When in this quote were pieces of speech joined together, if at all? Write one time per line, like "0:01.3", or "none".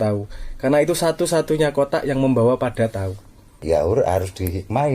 0:03.6